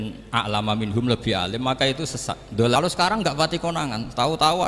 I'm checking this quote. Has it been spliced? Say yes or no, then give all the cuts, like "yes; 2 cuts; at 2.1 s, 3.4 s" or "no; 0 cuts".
yes; 1 cut; at 2.8 s